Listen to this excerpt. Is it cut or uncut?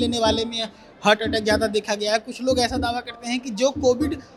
uncut